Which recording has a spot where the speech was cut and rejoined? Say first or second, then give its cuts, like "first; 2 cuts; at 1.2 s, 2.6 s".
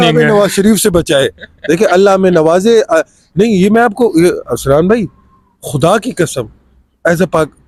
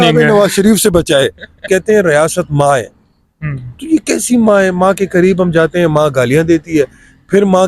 second; 1 cut; at 1.6 s